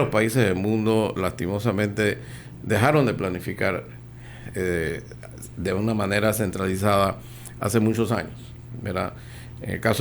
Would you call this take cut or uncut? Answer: uncut